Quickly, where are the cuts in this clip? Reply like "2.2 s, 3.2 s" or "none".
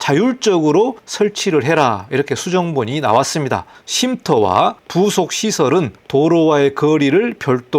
1.0 s, 3.8 s